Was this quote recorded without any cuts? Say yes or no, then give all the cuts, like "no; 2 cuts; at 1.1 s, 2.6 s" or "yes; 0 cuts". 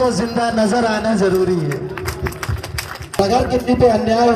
no; 1 cut; at 3.2 s